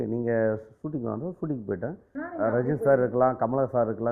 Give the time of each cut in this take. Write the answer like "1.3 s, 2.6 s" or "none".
2.3 s